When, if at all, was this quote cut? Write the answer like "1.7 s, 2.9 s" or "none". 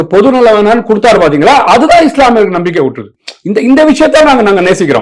none